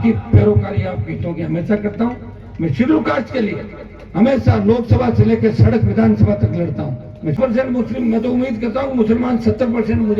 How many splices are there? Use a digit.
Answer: 1